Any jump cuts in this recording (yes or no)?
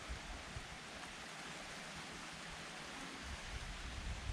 no